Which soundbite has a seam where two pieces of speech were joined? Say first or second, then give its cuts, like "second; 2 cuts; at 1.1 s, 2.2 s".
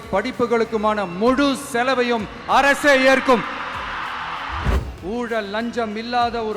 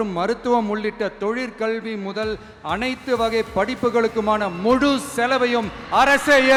first; 1 cut; at 4.8 s